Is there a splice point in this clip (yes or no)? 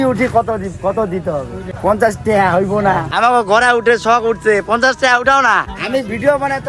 yes